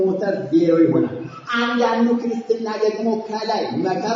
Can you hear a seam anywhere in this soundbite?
no; 0 cuts

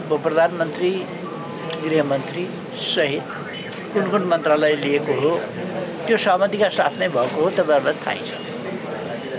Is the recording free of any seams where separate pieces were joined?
yes; 0 cuts

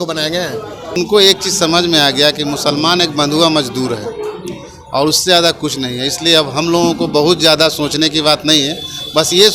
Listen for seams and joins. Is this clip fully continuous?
no; 1 cut; at 1.0 s

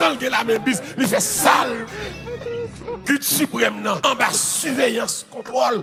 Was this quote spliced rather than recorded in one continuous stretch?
no; 0 cuts

